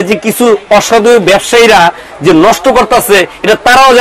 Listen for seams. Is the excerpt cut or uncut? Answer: uncut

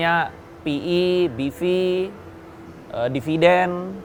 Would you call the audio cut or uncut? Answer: uncut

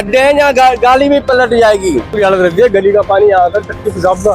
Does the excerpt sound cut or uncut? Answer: cut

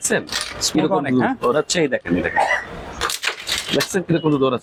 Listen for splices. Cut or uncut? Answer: uncut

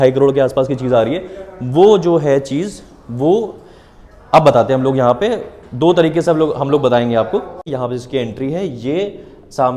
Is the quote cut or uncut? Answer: cut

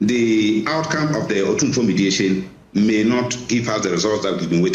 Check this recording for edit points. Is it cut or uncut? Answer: uncut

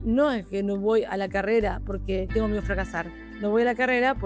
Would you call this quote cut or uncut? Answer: cut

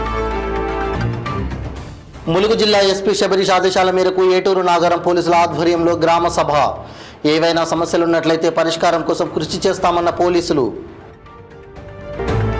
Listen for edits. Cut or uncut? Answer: cut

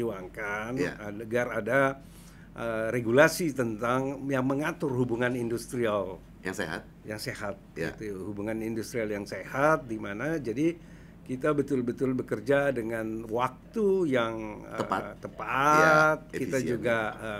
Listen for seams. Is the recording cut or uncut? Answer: uncut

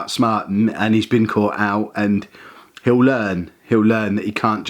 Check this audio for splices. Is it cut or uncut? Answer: uncut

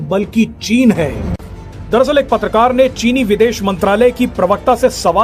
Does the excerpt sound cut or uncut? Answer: uncut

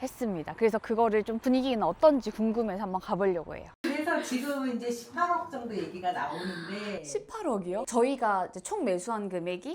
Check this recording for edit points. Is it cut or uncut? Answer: cut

